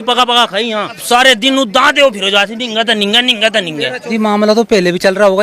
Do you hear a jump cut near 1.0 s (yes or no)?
yes